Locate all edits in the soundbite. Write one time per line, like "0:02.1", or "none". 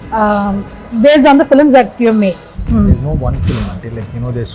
0:02.5